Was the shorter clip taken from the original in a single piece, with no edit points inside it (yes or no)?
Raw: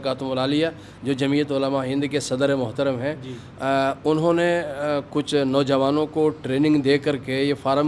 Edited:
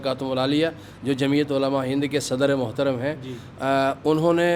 yes